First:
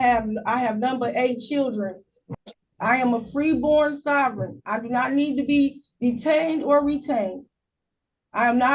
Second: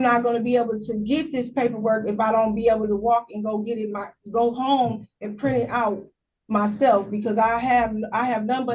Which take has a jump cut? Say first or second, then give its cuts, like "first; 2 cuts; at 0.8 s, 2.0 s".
first; 1 cut; at 2.2 s